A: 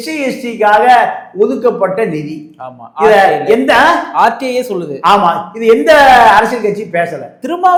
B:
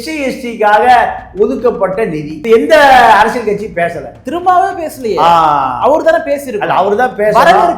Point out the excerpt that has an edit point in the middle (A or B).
B